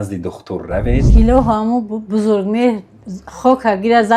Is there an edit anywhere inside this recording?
yes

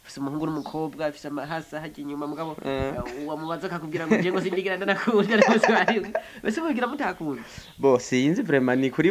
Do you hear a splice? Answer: no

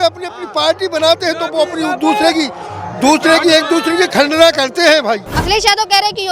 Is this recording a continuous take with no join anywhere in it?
no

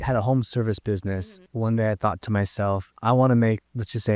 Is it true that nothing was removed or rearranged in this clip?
no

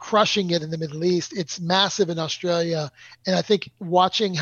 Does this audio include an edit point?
yes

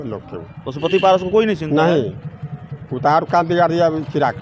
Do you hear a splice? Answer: no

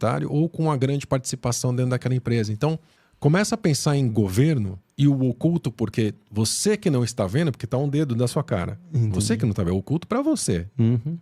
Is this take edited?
no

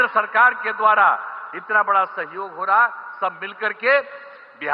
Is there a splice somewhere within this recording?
no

